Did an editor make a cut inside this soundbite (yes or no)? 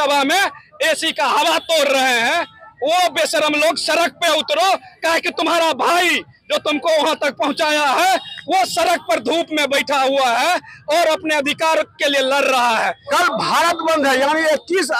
yes